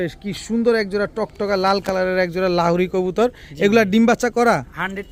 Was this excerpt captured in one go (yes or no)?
yes